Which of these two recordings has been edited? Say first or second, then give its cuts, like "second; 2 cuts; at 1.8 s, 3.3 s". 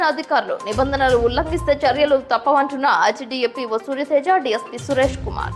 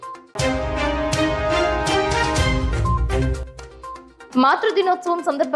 second; 1 cut; at 4.1 s